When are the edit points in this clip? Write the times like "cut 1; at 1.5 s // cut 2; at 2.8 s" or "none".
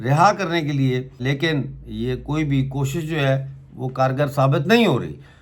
cut 1; at 1.2 s